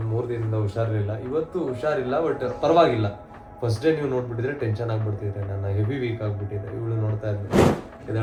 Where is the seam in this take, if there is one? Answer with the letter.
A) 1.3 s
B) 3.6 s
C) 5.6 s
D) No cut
D